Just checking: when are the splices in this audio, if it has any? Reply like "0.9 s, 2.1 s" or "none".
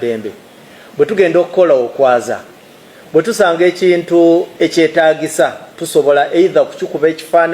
5.7 s